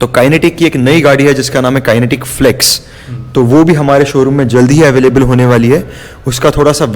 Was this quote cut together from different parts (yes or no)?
no